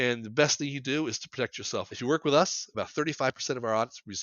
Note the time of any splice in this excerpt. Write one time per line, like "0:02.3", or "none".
0:01.9